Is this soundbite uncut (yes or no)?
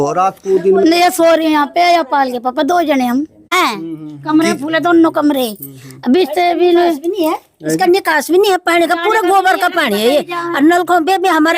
no